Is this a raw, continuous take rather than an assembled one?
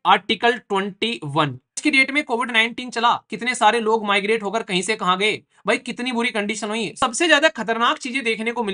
no; 2 cuts; at 1.8 s, 7.0 s

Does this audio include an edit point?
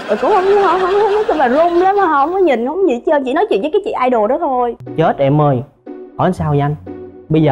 yes; 1 cut; at 4.8 s

